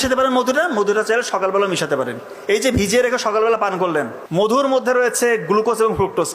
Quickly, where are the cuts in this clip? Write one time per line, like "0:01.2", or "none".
0:04.6

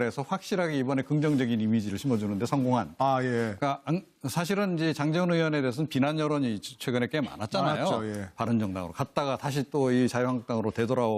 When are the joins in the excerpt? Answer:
0:02.7

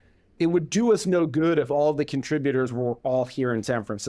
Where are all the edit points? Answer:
0:01.0

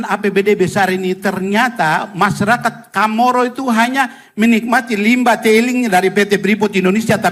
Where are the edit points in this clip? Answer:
none

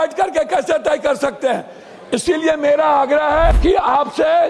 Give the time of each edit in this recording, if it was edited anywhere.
0:03.6

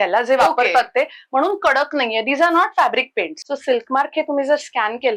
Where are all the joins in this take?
0:03.3

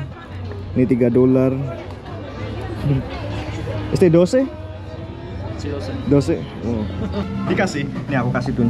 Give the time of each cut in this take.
0:07.3

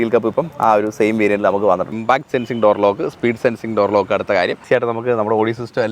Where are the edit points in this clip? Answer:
0:01.9
0:04.6

